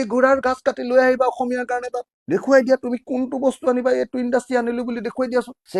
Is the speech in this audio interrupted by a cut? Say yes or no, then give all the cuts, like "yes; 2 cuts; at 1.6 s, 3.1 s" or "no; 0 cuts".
no; 0 cuts